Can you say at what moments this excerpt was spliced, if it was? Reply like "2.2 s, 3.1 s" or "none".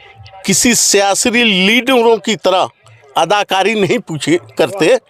none